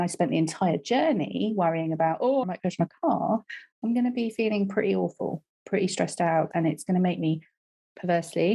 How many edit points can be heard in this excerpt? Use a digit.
2